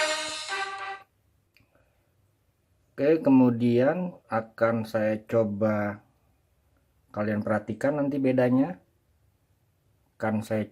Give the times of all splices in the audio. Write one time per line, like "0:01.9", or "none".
0:01.5